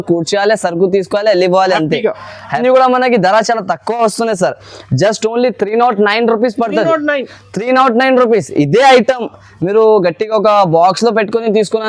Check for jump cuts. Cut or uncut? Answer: cut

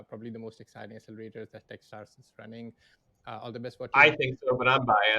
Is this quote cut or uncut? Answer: uncut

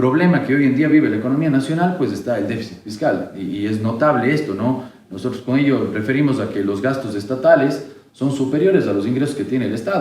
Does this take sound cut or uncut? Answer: uncut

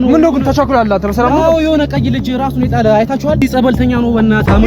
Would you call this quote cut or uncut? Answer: cut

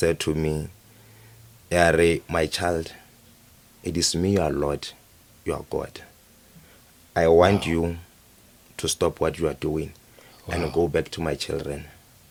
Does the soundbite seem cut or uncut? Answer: uncut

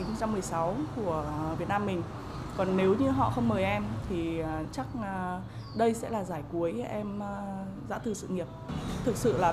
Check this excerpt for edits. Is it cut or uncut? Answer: cut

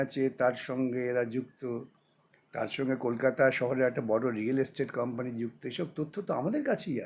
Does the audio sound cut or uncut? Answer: uncut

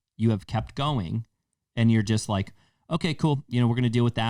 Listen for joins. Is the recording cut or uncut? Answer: uncut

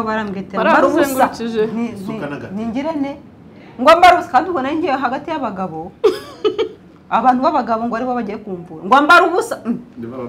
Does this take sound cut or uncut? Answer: uncut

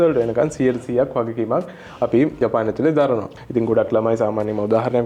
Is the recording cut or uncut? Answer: cut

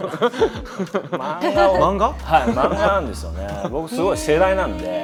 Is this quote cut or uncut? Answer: uncut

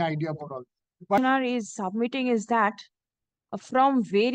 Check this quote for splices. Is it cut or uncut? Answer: cut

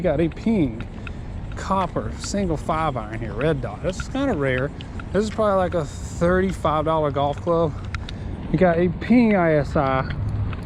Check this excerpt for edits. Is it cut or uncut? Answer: uncut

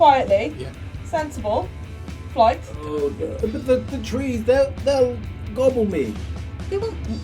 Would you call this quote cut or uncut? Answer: cut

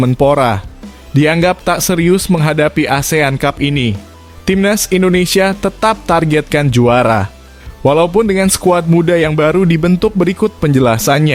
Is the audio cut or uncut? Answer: uncut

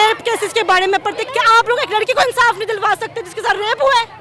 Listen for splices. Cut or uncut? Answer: cut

